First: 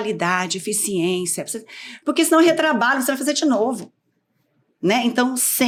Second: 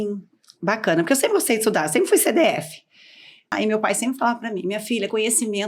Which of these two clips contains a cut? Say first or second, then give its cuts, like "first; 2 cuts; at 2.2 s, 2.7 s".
second; 1 cut; at 3.5 s